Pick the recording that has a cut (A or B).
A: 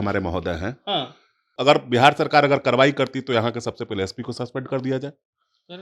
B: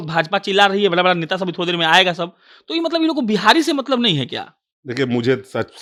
A